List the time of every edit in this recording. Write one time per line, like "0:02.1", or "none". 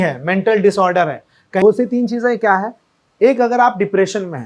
0:01.6